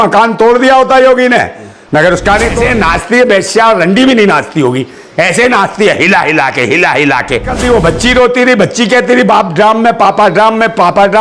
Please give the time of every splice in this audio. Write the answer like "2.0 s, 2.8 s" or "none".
2.6 s, 7.5 s